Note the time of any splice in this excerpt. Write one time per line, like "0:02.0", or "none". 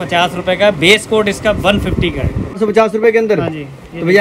0:02.6